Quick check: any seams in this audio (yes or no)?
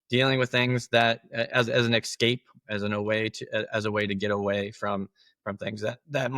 no